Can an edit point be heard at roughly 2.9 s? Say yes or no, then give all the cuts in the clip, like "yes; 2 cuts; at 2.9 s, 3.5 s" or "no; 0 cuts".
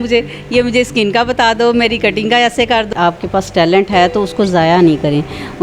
yes; 1 cut; at 2.9 s